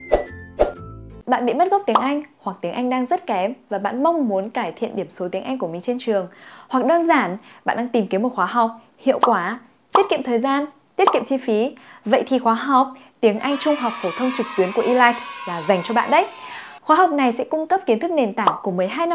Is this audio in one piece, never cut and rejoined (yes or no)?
no